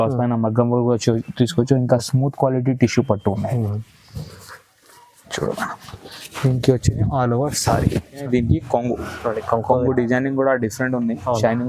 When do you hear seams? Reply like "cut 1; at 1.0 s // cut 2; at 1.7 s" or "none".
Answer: cut 1; at 8.3 s